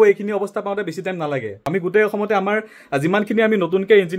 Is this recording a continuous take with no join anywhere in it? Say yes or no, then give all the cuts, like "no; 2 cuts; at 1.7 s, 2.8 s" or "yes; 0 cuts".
no; 1 cut; at 1.6 s